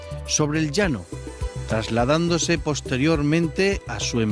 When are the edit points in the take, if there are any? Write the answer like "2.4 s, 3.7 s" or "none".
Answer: 3.3 s